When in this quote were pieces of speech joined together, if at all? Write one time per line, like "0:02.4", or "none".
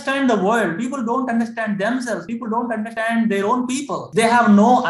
none